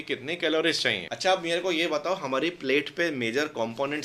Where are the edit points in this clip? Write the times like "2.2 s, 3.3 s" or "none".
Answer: 1.1 s

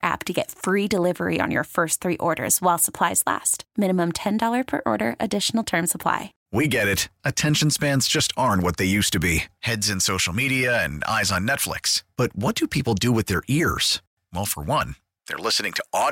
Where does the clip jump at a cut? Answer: 6.4 s

